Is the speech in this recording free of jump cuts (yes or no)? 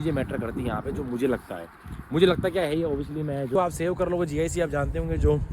no